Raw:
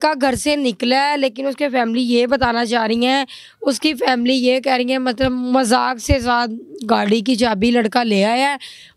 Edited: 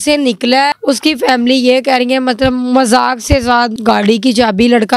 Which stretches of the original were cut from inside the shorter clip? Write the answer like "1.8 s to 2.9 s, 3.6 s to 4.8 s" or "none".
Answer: 1.1 s to 3.5 s, 6.5 s to 6.8 s